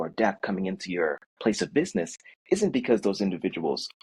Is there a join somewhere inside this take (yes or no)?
no